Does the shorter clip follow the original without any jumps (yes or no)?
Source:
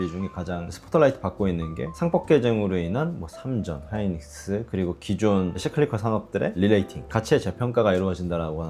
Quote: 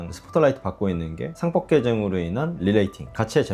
no